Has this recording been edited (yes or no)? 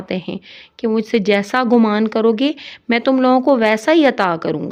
no